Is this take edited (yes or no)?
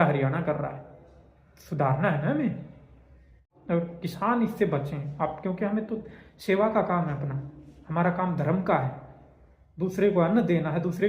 yes